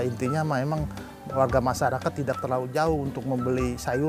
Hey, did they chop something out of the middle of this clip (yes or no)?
no